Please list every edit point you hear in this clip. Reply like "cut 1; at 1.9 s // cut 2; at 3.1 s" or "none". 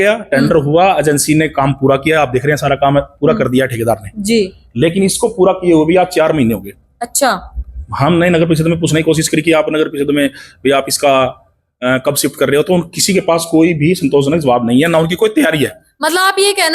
none